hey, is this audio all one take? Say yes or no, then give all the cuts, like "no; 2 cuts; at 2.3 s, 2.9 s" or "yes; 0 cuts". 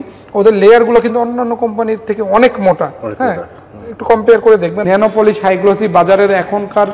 no; 1 cut; at 4.8 s